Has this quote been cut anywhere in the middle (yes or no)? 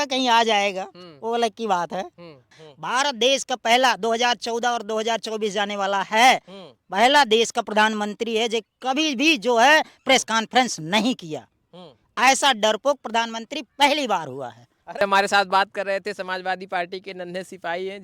yes